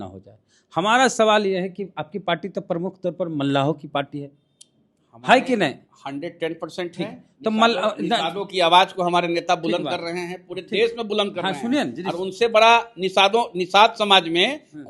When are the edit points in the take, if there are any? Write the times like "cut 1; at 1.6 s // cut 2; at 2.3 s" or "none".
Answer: none